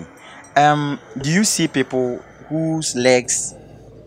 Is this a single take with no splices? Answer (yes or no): yes